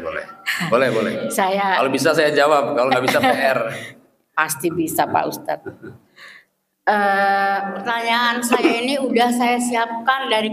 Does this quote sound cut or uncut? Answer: cut